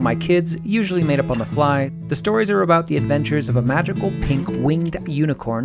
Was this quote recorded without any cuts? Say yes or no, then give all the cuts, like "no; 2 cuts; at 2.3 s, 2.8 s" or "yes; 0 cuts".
no; 1 cut; at 2.0 s